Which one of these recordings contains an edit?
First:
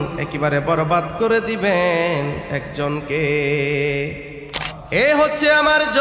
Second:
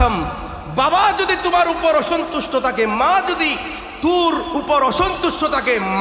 first; 1 cut; at 4.6 s

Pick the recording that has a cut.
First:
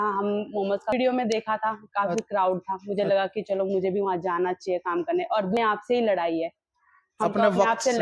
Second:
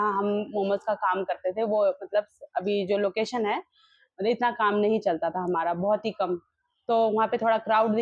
first; 2 cuts; at 0.9 s, 5.6 s

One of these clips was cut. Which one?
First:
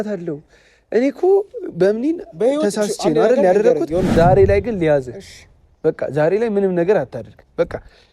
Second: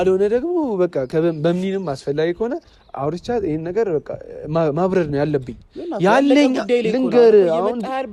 first; 1 cut; at 4.1 s

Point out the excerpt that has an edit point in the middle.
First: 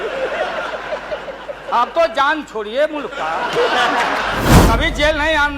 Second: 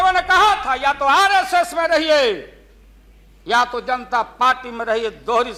first; 1 cut; at 4.6 s

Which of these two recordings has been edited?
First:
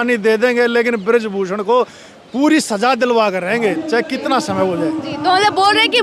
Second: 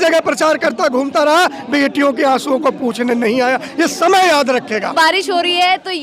second; 1 cut; at 4.9 s

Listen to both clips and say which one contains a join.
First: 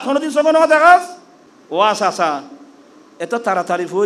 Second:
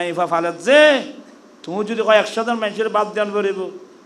first; 1 cut; at 1.0 s

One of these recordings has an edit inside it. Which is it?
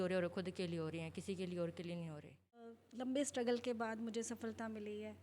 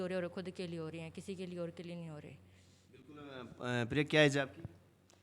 first; 1 cut; at 2.8 s

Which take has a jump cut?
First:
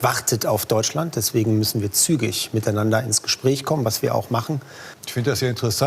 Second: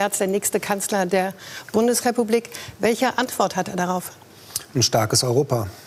first; 1 cut; at 4.9 s

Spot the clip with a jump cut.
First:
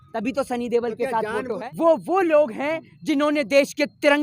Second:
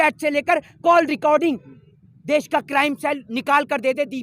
first; 1 cut; at 1.6 s

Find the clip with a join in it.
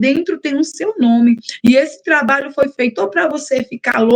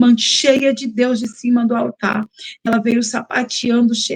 second; 1 cut; at 2.6 s

